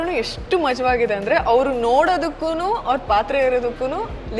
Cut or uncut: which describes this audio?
uncut